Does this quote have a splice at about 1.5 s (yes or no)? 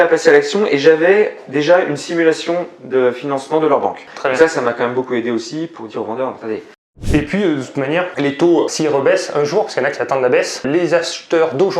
no